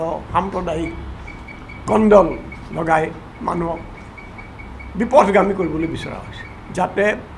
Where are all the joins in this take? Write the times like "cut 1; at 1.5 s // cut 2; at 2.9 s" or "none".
none